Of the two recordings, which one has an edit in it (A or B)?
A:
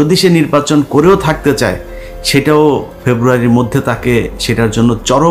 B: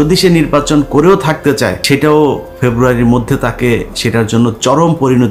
B